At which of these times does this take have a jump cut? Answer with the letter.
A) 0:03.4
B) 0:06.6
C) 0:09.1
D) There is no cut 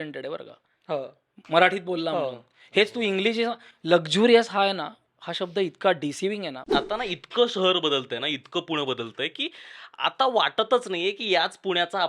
B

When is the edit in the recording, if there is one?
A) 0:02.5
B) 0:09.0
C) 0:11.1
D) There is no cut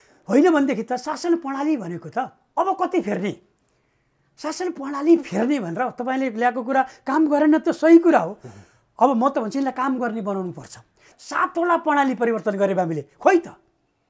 C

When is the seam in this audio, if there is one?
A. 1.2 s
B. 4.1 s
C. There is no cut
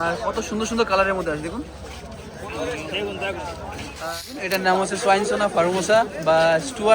B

